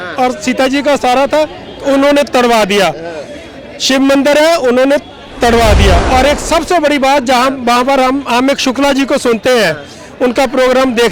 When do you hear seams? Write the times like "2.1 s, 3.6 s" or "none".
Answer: none